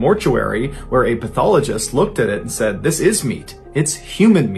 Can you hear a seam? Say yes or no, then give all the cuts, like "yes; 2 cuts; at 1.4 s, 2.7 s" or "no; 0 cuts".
no; 0 cuts